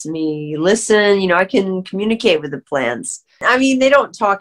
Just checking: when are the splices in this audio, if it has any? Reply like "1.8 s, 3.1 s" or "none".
3.4 s